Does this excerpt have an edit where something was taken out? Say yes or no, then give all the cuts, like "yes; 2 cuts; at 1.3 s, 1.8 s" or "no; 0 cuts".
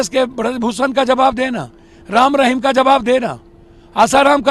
no; 0 cuts